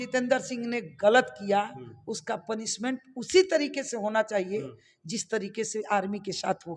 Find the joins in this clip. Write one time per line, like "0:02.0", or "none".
none